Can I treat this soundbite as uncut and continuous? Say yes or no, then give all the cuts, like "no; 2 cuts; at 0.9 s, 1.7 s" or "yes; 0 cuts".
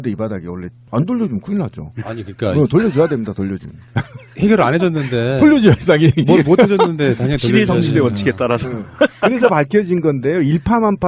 yes; 0 cuts